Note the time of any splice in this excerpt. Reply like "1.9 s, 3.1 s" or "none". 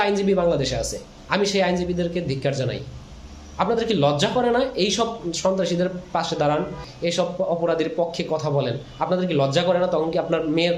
6.8 s

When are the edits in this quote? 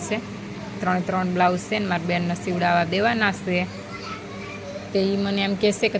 none

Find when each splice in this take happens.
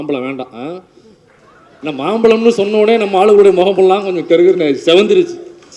none

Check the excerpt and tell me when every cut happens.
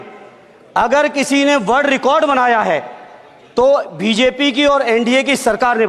none

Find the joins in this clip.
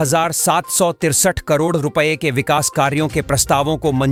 none

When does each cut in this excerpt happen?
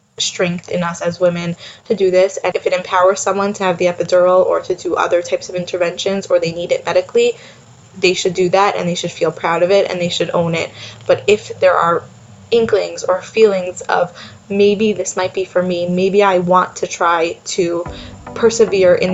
2.5 s

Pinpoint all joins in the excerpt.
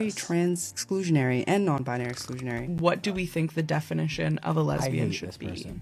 2.7 s

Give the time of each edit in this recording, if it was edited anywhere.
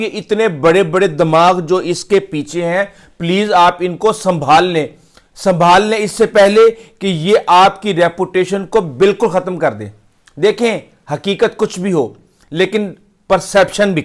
none

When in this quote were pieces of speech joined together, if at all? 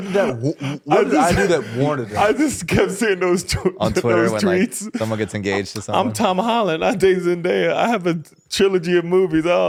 none

